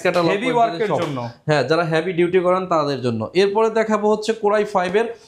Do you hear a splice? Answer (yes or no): no